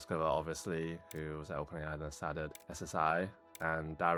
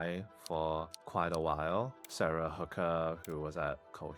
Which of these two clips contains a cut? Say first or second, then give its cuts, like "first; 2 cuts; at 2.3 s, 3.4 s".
second; 3 cuts; at 1.0 s, 2.0 s, 3.2 s